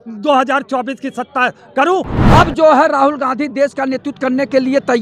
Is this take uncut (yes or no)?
no